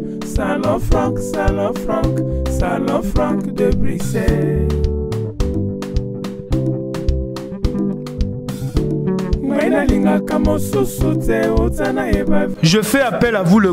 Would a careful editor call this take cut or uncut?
cut